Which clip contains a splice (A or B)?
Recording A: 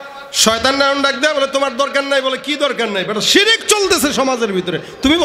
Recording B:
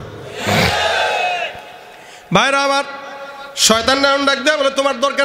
B